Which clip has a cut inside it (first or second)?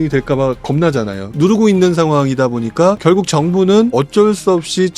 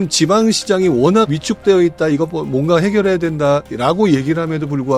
first